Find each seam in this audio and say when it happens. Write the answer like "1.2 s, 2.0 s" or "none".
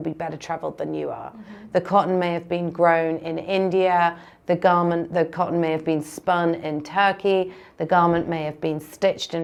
none

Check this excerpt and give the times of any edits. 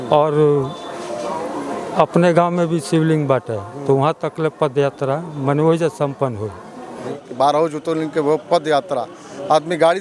7.0 s

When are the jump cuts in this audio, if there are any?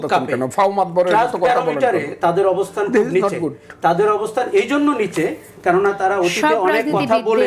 none

